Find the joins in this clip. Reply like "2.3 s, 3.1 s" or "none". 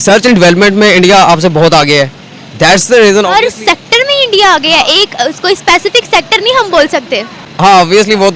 none